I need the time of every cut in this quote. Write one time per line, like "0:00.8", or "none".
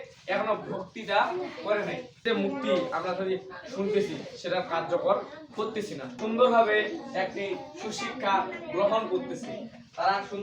0:02.3
0:06.2